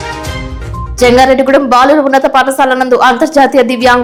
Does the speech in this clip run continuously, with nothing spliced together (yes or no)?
yes